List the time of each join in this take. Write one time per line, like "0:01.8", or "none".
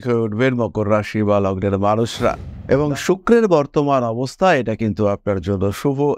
0:02.5